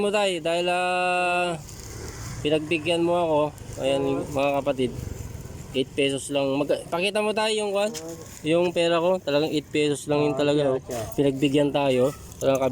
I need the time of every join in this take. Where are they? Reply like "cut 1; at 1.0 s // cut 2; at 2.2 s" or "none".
none

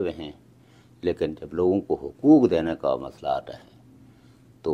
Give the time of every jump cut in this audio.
none

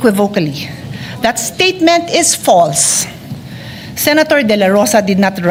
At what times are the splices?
none

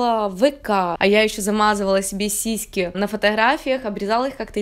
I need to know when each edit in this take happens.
cut 1; at 1.0 s

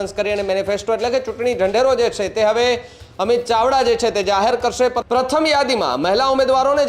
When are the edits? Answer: cut 1; at 5.0 s

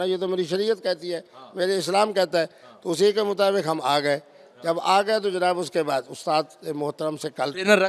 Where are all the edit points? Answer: none

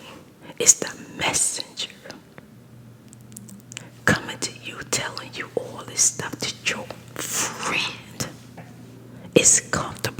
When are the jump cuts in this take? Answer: none

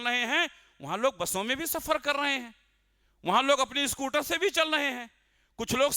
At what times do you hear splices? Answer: none

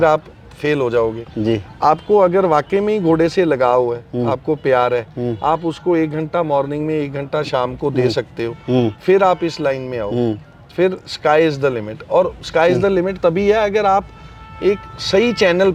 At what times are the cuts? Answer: none

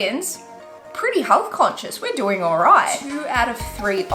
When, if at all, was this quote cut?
cut 1; at 3.1 s

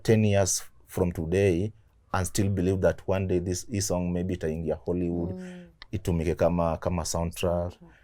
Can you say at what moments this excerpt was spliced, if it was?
none

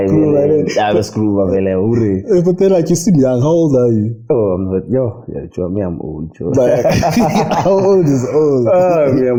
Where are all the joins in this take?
none

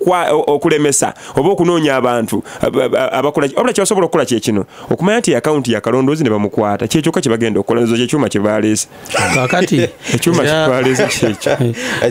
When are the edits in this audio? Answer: none

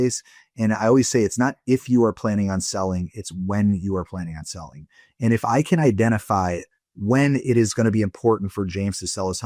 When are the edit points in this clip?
none

